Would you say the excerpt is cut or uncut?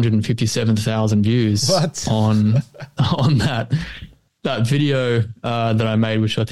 uncut